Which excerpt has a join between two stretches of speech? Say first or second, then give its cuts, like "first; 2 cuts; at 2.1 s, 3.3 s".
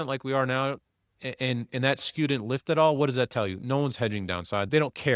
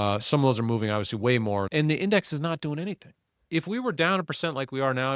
second; 2 cuts; at 1.7 s, 3.5 s